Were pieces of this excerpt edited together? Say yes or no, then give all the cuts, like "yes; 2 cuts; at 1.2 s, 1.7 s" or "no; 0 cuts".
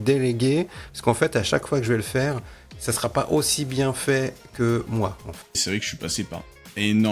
yes; 1 cut; at 5.6 s